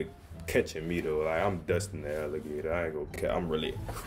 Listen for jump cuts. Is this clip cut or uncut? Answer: cut